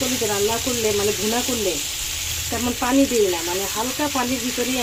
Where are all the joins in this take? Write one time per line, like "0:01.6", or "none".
none